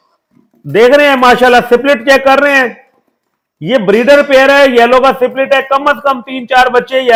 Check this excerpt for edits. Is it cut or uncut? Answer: uncut